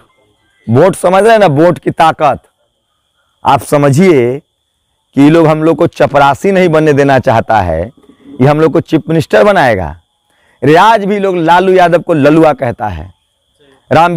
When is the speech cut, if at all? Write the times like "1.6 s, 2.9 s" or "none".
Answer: none